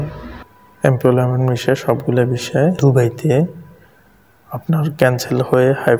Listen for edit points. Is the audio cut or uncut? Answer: cut